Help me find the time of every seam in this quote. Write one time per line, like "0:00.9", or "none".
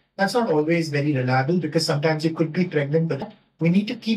0:03.2